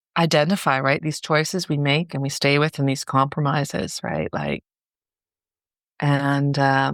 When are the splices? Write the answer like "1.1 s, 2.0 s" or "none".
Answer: none